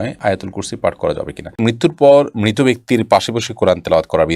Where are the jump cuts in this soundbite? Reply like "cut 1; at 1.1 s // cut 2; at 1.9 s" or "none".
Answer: cut 1; at 1.6 s